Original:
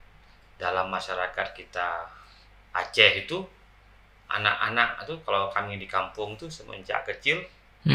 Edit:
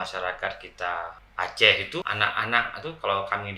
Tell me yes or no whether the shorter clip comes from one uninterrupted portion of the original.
no